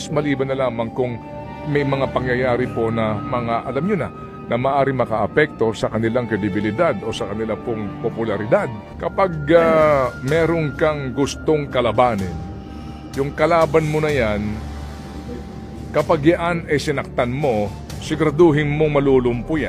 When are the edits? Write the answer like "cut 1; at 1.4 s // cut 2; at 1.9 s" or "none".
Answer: cut 1; at 8.8 s